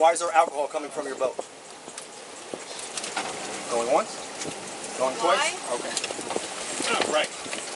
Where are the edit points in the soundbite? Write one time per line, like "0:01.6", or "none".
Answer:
0:02.9